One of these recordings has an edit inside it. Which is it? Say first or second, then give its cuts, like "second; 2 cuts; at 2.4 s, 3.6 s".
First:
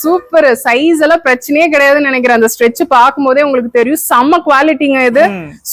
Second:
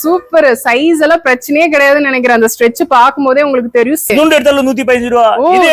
second; 1 cut; at 4.1 s